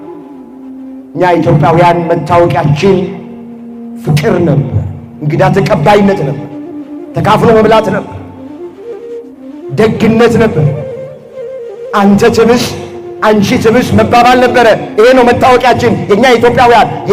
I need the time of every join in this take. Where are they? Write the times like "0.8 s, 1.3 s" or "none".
none